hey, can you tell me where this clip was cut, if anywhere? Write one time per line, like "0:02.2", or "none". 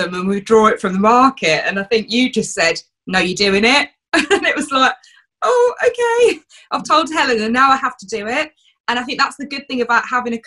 none